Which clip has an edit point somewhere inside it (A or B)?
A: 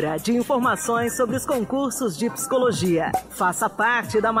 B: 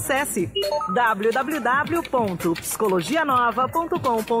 A